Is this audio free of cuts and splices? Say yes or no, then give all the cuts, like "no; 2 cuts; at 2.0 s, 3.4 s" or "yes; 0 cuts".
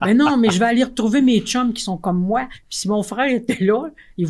no; 1 cut; at 2.6 s